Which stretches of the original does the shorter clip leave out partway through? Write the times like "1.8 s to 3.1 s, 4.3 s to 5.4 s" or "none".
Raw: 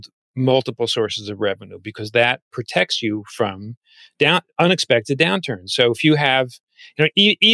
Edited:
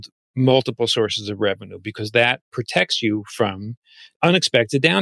4.1 s to 4.5 s